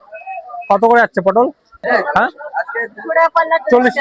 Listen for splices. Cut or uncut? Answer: cut